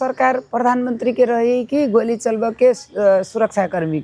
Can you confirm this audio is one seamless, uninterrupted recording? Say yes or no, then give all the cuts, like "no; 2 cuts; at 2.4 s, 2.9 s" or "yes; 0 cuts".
yes; 0 cuts